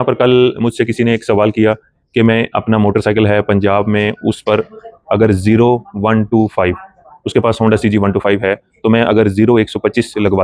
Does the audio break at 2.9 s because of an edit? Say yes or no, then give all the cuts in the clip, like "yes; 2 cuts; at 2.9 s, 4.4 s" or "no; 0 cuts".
no; 0 cuts